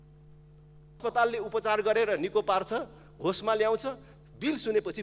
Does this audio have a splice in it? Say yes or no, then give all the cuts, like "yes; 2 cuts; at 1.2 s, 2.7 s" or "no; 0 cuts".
yes; 1 cut; at 1.0 s